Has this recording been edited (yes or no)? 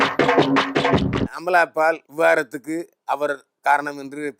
yes